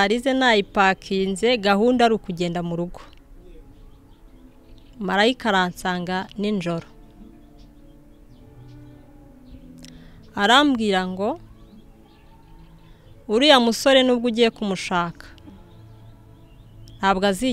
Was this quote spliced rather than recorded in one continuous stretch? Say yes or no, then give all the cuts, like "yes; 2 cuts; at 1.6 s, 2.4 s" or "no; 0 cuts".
no; 0 cuts